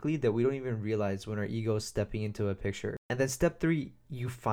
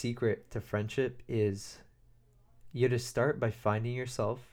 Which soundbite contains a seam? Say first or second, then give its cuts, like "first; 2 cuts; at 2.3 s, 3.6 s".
first; 1 cut; at 3.0 s